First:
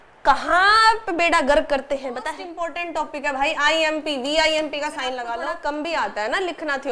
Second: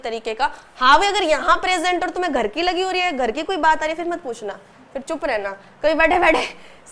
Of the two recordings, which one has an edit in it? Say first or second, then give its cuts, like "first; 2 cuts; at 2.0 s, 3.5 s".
first; 2 cuts; at 2.8 s, 5.5 s